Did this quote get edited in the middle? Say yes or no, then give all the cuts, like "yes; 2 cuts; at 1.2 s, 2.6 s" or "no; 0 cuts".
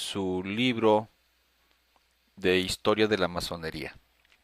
yes; 1 cut; at 1.6 s